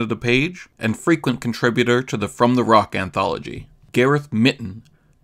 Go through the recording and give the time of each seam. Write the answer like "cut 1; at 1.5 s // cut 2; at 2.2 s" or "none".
cut 1; at 3.8 s